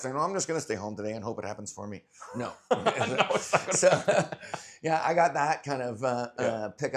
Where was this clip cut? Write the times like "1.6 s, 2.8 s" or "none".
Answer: none